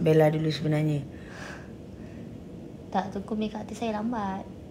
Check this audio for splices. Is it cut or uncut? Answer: uncut